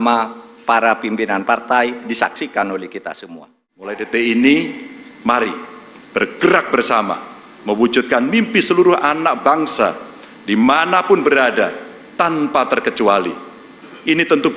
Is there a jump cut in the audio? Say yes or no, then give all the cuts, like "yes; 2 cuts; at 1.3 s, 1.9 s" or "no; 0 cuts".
yes; 1 cut; at 4.0 s